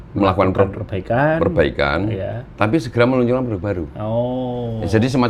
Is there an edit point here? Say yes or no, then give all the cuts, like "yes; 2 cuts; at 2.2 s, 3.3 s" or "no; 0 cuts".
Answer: no; 0 cuts